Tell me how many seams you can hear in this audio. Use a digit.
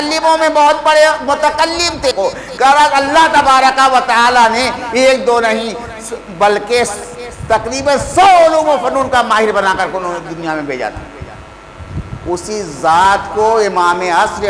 1